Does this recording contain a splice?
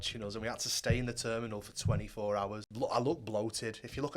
yes; 1 cut; at 2.7 s

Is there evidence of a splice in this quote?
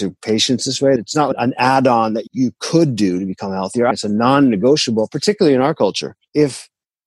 yes; 3 cuts; at 1.0 s, 3.9 s, 6.1 s

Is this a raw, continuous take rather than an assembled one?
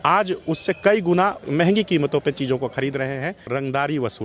no; 2 cuts; at 1.4 s, 3.4 s

